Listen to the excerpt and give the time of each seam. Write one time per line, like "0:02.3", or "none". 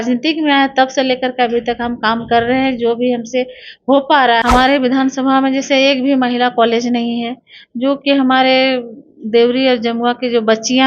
0:04.4